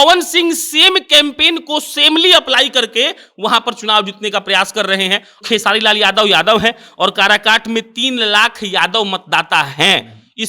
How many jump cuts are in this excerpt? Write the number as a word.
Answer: one